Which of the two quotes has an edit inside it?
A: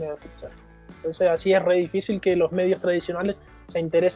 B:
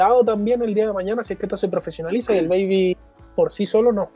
B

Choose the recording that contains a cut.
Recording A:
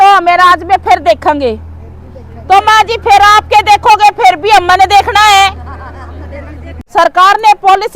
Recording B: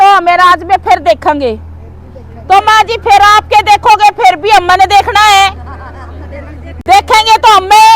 A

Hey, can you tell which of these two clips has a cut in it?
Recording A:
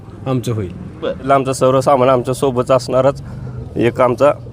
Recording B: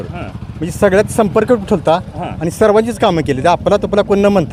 A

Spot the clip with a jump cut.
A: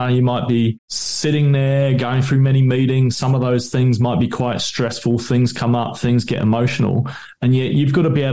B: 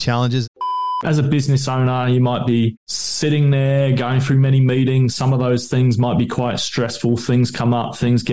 B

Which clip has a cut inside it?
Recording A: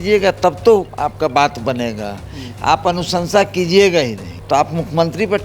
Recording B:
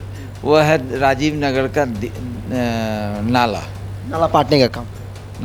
A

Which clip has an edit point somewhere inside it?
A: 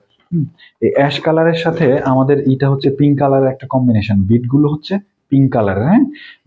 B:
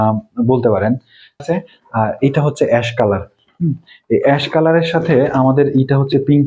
B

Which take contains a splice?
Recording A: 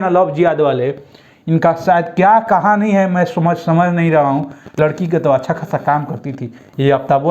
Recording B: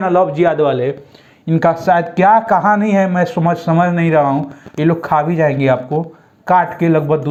A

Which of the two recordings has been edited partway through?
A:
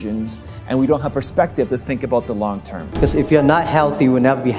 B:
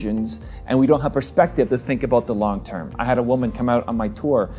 A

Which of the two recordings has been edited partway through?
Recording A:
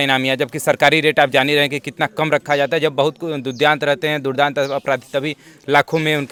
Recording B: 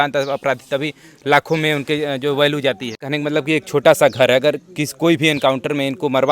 B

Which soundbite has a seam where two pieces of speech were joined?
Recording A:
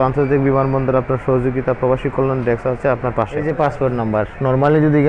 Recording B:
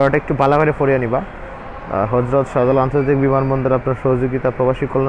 A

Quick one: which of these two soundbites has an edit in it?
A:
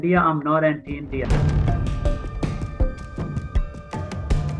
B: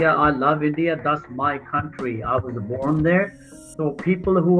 A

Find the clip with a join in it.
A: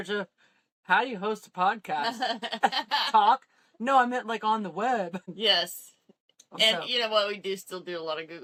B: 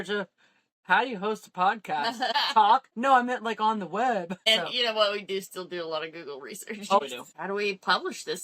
B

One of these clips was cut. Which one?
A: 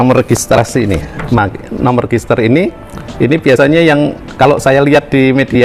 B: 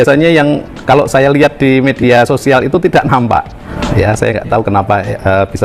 B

